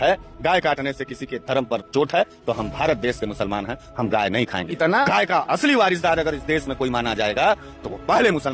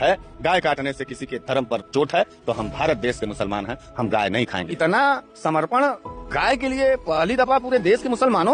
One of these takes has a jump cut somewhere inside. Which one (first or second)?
first